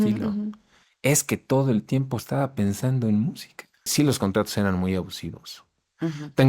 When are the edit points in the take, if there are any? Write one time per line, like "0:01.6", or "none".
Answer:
0:03.9